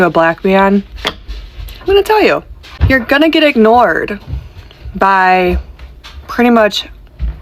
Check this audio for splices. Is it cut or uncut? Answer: uncut